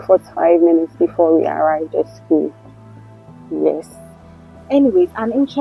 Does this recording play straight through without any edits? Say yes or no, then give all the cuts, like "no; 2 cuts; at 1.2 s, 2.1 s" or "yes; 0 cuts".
yes; 0 cuts